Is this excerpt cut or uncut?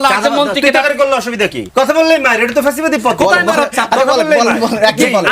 cut